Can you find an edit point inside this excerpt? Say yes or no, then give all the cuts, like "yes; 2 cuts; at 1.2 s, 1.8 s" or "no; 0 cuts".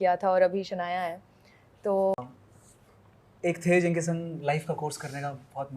yes; 1 cut; at 2.2 s